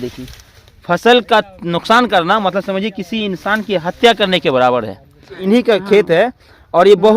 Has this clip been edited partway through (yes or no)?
yes